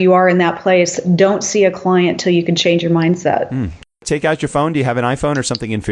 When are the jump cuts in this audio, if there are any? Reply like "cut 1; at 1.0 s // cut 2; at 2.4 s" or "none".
cut 1; at 4.0 s